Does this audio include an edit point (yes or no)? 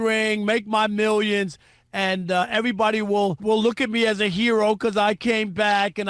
yes